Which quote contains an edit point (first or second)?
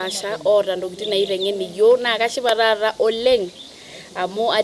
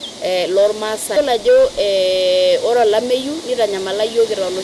second